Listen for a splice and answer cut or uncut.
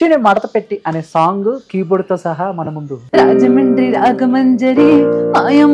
cut